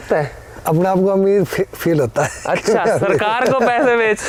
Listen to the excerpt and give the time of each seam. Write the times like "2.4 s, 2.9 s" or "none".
none